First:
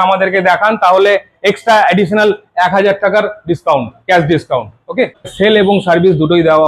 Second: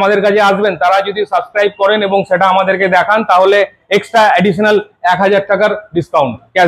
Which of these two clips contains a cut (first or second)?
first